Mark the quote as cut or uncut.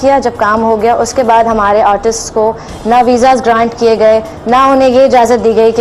uncut